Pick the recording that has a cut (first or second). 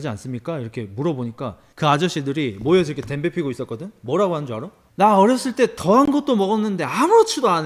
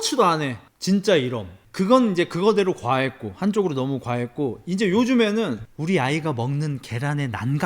second